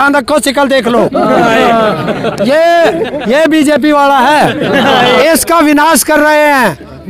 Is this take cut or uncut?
cut